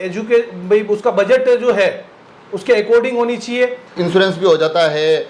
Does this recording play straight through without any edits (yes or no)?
no